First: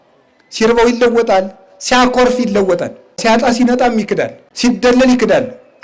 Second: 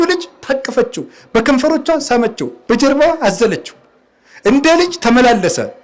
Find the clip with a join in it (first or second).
first